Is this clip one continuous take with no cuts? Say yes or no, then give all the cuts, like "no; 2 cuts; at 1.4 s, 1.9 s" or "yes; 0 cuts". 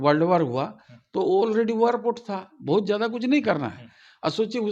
yes; 0 cuts